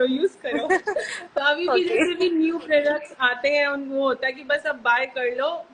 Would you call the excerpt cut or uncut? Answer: uncut